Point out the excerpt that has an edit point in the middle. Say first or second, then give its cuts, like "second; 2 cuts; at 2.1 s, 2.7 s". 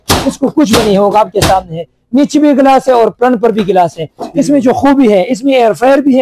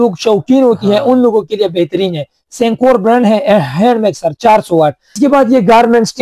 second; 1 cut; at 5.2 s